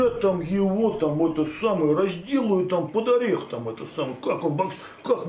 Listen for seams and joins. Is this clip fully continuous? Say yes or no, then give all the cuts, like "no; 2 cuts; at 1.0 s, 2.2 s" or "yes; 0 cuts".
yes; 0 cuts